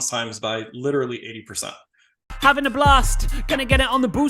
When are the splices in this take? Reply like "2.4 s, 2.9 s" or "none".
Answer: 2.2 s